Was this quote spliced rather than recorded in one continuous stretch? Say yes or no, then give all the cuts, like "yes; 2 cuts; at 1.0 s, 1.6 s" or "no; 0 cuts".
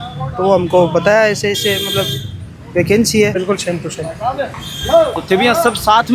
yes; 1 cut; at 3.3 s